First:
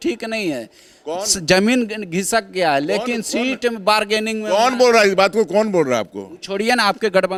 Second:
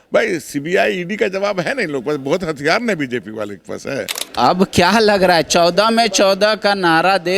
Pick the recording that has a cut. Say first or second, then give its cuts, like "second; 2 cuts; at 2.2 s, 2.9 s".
second; 1 cut; at 4.2 s